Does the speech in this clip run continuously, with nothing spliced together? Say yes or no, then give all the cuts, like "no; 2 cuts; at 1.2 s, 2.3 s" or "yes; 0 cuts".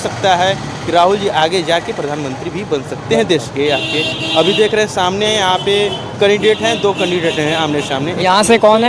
yes; 0 cuts